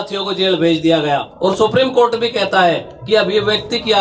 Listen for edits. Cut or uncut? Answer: cut